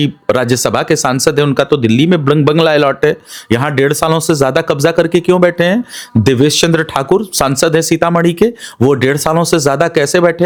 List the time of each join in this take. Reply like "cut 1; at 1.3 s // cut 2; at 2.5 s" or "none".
none